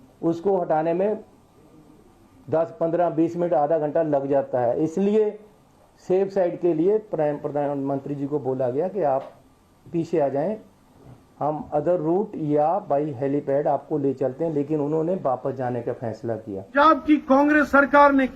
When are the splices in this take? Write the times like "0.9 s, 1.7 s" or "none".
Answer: 16.7 s